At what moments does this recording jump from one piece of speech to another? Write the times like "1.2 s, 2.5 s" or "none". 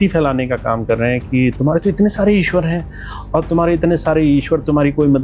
none